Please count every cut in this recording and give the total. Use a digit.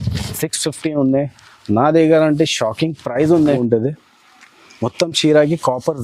1